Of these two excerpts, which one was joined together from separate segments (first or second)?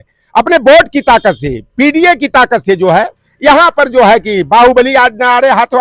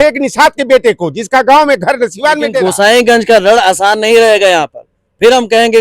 second